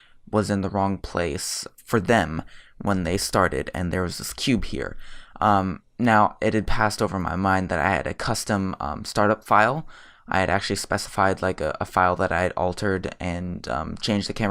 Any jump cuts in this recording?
no; 0 cuts

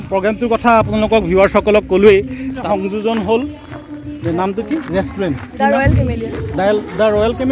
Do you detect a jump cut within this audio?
yes; 1 cut; at 2.7 s

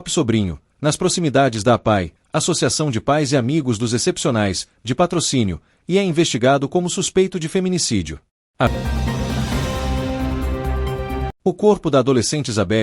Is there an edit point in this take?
yes; 1 cut; at 8.7 s

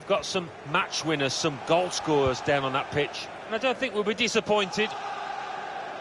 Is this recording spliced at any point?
yes; 1 cut; at 4.9 s

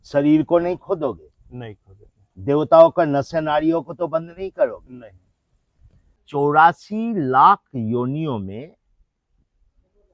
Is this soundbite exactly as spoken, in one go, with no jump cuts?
no; 1 cut; at 6.2 s

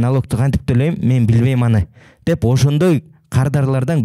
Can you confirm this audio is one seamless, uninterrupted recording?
yes; 0 cuts

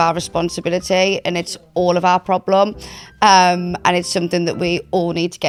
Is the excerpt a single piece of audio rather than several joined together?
yes; 0 cuts

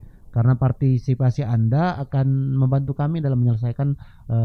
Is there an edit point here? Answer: no; 0 cuts

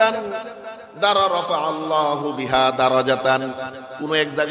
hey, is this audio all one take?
yes; 0 cuts

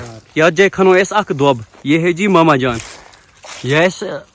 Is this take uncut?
yes; 0 cuts

